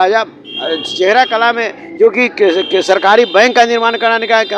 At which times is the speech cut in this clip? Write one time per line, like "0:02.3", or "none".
none